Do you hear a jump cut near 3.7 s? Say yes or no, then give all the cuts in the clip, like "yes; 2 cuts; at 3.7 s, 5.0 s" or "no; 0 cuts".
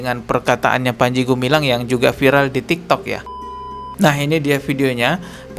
yes; 1 cut; at 3.7 s